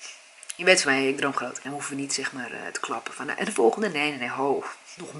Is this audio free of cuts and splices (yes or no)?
no